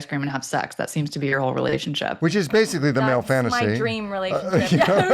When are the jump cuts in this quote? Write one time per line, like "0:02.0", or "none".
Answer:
none